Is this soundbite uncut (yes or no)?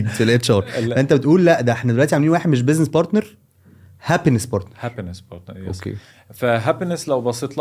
yes